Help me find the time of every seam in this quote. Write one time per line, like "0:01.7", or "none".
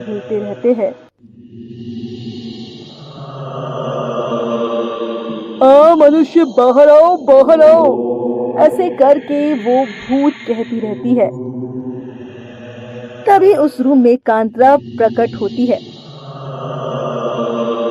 none